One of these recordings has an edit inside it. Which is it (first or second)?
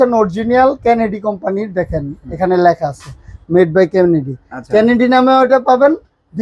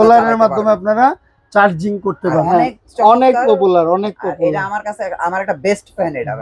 second